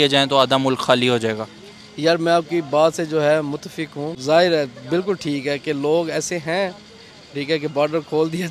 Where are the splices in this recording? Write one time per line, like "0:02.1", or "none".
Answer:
0:04.1

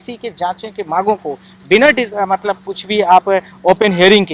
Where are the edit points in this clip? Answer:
none

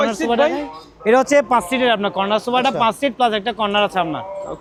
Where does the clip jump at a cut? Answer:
none

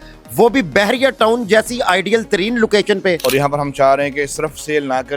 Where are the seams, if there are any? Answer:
0:03.2

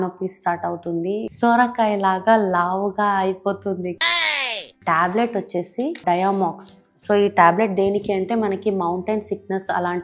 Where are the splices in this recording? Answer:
0:01.3
0:04.8
0:06.0

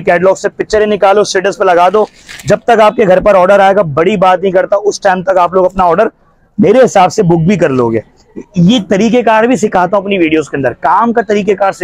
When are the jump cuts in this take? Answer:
none

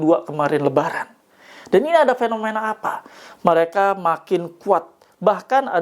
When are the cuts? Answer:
none

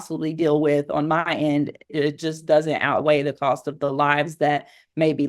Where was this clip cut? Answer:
0:01.9

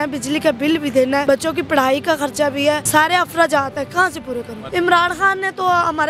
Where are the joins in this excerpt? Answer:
0:01.2
0:02.8
0:04.6

